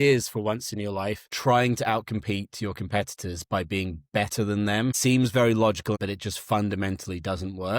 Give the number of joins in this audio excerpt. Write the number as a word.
three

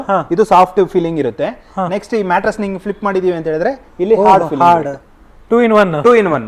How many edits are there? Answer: zero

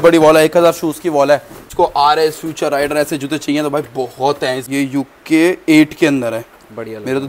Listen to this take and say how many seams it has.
two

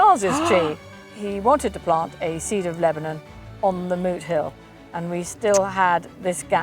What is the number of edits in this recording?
one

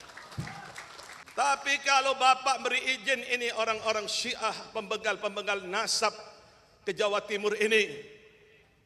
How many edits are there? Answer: one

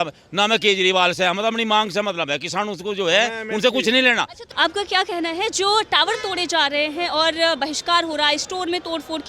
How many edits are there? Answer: one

